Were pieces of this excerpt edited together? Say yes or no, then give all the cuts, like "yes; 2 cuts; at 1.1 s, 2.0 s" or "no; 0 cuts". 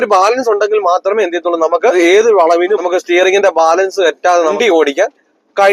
yes; 3 cuts; at 1.9 s, 2.8 s, 4.5 s